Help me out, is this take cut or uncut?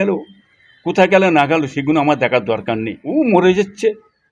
cut